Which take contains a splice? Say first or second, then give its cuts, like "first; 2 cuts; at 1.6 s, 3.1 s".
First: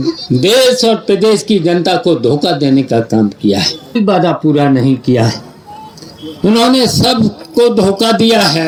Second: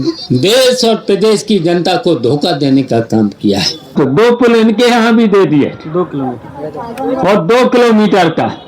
second; 1 cut; at 3.9 s